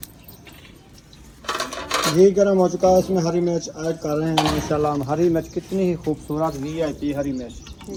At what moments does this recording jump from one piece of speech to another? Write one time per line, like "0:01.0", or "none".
none